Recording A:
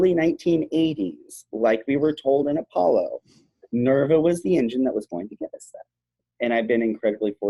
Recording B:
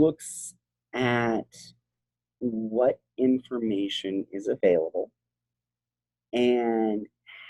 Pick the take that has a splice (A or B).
A